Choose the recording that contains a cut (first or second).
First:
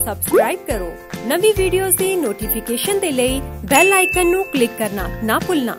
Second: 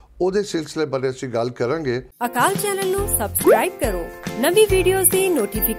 second